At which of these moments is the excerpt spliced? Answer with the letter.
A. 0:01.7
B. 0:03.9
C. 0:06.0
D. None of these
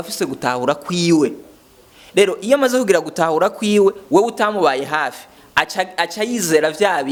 D